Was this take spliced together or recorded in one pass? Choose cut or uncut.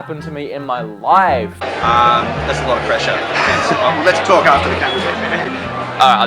cut